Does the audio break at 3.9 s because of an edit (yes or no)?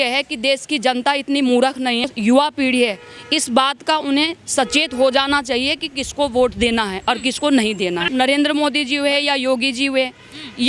no